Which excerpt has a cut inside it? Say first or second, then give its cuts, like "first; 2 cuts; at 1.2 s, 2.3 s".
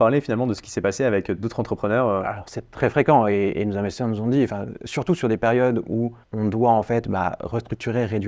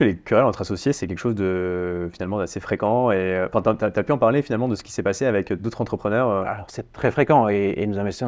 first; 1 cut; at 6.2 s